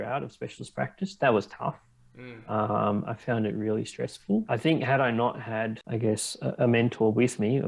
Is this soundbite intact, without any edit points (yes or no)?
no